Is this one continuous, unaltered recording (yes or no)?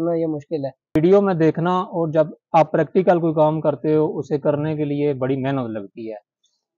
no